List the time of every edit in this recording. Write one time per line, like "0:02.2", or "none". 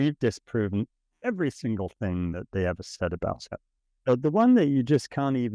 0:03.9